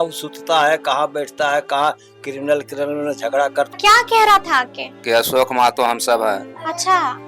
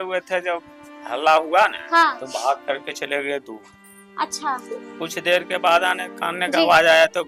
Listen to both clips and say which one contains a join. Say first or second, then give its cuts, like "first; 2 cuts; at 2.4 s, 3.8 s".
first; 1 cut; at 3.7 s